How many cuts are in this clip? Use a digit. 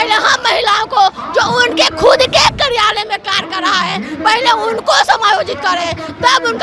0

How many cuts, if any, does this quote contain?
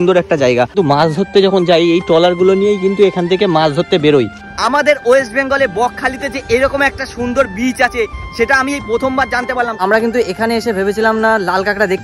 3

